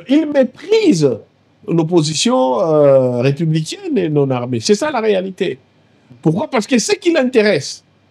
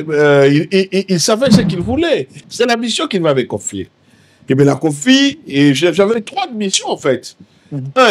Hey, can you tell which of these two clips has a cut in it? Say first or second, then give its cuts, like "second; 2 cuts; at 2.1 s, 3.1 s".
second; 1 cut; at 2.4 s